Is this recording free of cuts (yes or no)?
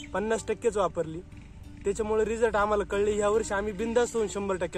yes